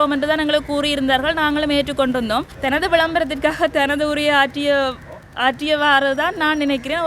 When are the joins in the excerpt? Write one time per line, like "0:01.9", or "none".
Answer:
0:02.5